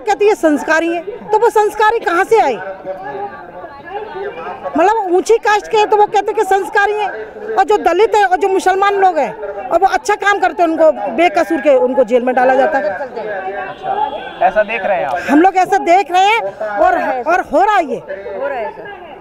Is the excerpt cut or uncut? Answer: uncut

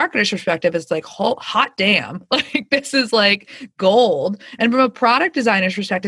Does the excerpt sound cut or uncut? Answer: uncut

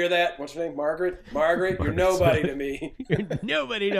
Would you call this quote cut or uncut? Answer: uncut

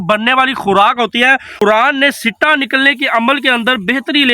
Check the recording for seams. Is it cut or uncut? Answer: cut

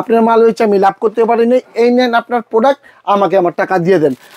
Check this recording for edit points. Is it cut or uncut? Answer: uncut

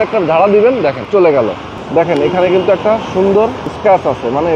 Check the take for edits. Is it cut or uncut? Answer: cut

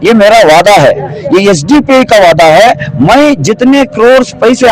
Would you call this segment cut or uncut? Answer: uncut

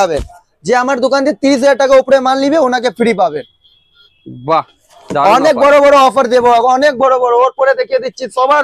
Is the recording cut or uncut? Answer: uncut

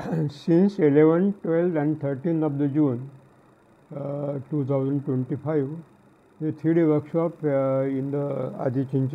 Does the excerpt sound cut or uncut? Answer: uncut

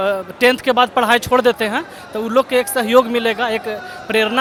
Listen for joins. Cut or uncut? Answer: uncut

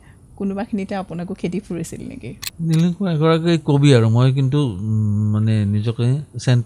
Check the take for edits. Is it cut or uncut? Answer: cut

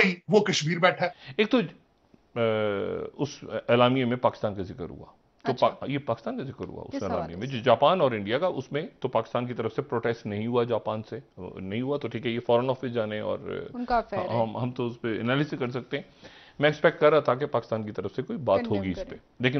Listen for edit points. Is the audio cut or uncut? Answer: cut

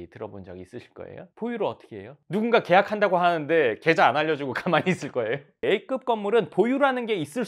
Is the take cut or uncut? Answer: cut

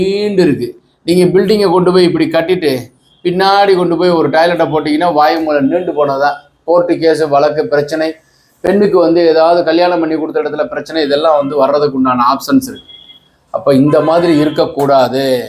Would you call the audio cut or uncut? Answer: uncut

